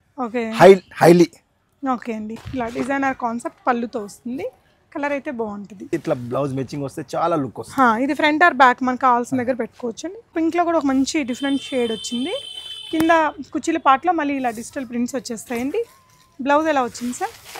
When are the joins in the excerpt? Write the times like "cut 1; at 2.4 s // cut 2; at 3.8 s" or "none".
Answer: cut 1; at 2.4 s // cut 2; at 5.9 s // cut 3; at 10.3 s